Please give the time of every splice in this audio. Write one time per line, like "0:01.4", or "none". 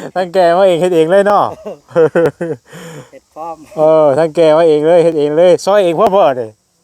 none